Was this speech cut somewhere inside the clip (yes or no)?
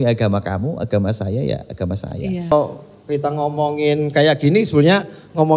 yes